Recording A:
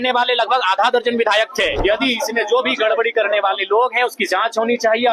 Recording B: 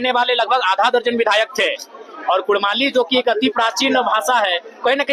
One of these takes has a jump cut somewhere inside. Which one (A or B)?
A